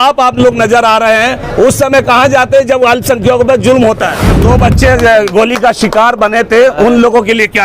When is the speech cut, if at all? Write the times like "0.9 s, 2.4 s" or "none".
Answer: 4.4 s

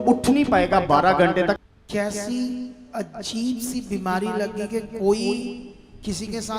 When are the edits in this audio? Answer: 1.6 s

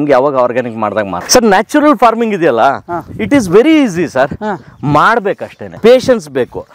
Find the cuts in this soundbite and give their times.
1.2 s, 5.8 s

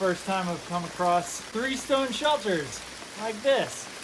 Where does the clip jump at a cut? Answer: 1.4 s

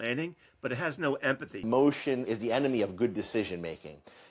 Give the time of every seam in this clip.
1.6 s, 2.3 s

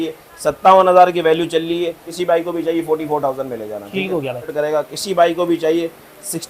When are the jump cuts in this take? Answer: 2.1 s, 4.5 s

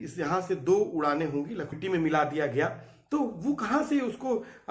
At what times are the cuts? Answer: 1.8 s

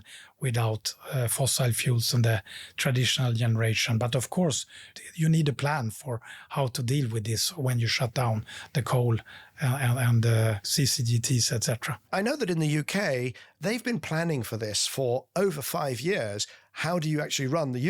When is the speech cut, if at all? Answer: 4.9 s, 10.7 s, 12.0 s, 13.4 s

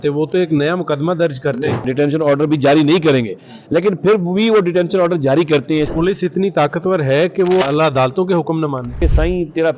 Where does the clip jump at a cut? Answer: 1.8 s, 5.9 s, 7.6 s, 9.0 s

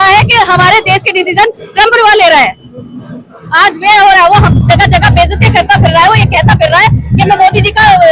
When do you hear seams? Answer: none

